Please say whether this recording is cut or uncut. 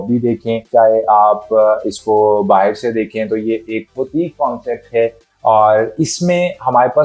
uncut